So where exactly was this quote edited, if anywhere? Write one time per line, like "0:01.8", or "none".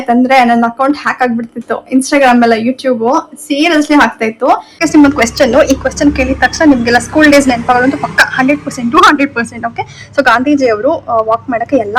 0:04.7